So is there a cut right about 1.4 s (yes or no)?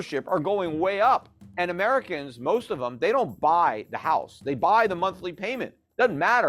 yes